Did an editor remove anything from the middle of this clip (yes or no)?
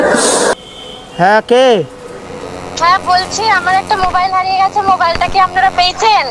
no